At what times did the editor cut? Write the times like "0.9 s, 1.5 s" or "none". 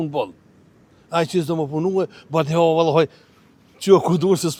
none